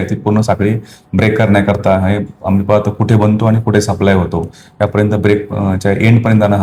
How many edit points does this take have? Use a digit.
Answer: 0